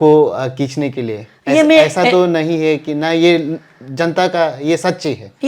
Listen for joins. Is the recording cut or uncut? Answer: uncut